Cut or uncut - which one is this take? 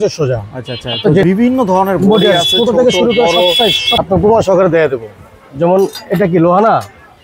cut